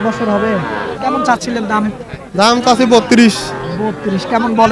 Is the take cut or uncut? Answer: uncut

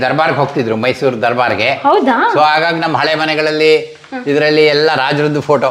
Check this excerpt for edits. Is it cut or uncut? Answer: uncut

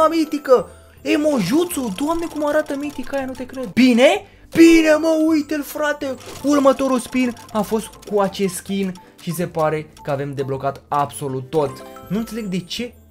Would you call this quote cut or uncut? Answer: cut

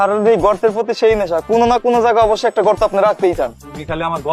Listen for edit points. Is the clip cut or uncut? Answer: uncut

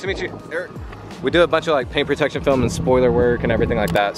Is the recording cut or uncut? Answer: cut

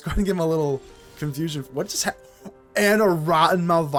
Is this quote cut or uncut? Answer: uncut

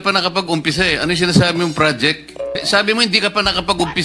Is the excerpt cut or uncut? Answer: cut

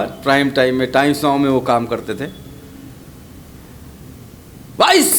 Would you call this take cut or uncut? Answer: uncut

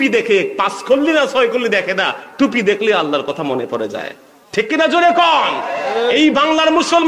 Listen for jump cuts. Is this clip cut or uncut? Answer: uncut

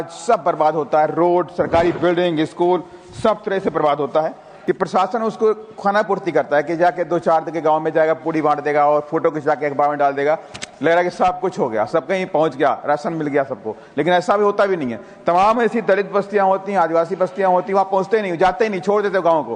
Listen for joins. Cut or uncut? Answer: cut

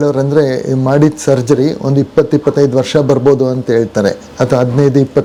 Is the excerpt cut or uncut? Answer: uncut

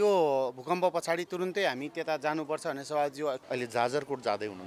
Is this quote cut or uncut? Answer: cut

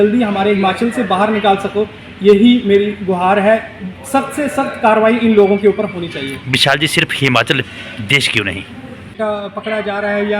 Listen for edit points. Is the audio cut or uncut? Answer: cut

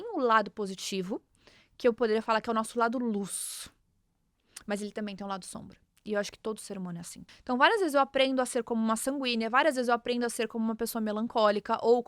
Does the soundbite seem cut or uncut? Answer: cut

